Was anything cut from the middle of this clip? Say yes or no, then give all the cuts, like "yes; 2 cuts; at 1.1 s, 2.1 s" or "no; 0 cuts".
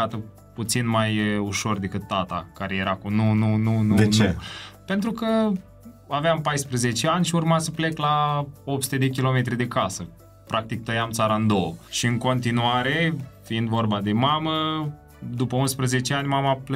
yes; 1 cut; at 11.9 s